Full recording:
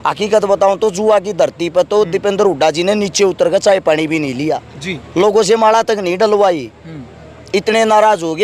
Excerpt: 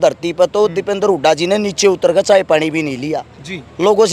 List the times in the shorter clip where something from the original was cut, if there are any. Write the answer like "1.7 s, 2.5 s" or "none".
none